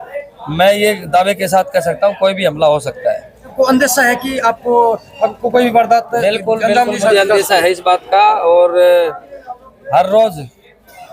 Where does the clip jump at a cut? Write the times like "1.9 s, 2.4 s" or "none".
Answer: 3.5 s